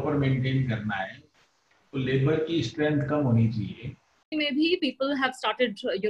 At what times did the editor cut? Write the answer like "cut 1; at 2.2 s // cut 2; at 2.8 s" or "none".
cut 1; at 4.3 s